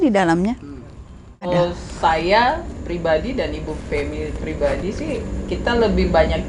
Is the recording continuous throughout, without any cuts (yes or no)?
no